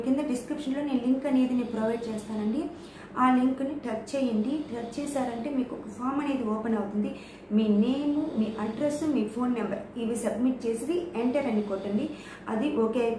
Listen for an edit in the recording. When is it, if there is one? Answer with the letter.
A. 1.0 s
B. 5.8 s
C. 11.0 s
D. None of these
D